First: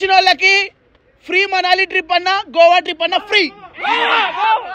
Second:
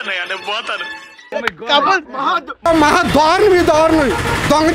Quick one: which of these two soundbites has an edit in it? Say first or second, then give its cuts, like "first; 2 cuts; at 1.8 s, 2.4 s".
second; 1 cut; at 1.3 s